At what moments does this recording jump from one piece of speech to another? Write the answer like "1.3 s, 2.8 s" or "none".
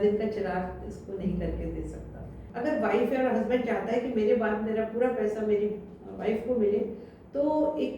2.5 s